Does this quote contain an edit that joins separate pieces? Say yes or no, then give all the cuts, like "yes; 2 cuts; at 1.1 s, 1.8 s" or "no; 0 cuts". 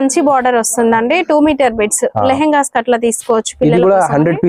no; 0 cuts